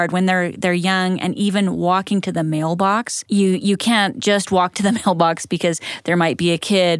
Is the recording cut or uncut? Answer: cut